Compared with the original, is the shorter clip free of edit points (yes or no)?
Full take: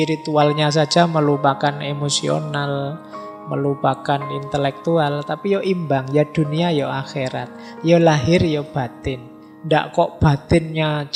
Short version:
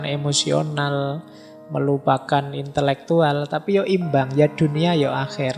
yes